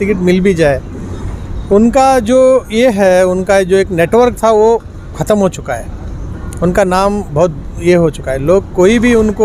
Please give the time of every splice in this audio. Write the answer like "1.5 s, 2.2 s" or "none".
none